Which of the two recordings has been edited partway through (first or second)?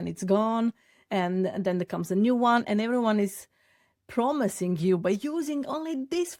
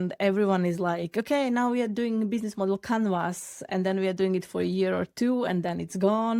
second